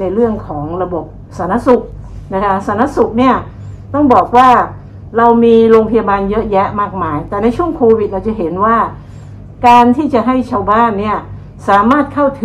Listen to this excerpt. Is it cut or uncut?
uncut